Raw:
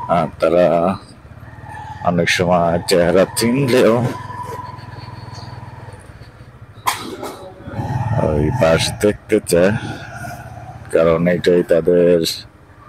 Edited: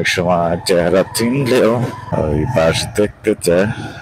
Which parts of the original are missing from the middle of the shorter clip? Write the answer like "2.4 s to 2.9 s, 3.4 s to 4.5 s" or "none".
4.2 s to 8.1 s